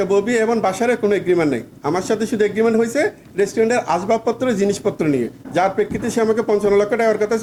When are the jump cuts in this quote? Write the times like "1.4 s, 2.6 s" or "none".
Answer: none